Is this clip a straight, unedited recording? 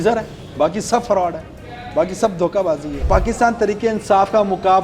no; 1 cut; at 3.0 s

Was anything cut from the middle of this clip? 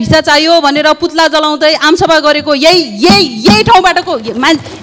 no; 0 cuts

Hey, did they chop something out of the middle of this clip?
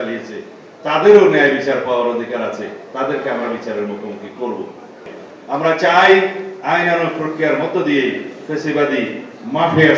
yes; 1 cut; at 5.1 s

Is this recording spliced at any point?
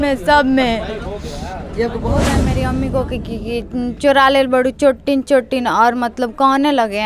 yes; 1 cut; at 2.5 s

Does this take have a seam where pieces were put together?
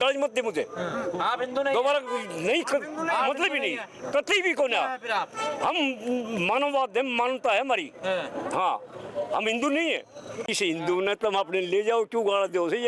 yes; 1 cut; at 10.5 s

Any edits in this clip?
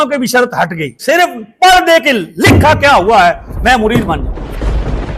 yes; 1 cut; at 1.0 s

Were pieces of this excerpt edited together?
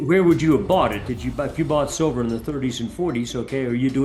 no; 0 cuts

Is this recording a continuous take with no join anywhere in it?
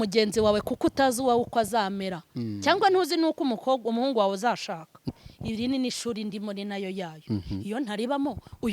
no; 1 cut; at 5.0 s

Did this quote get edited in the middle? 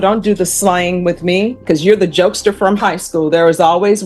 yes; 1 cut; at 1.6 s

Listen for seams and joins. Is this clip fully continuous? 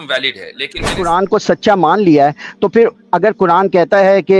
no; 1 cut; at 1.0 s

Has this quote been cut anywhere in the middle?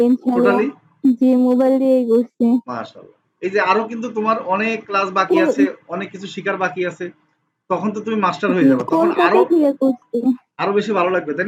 no; 0 cuts

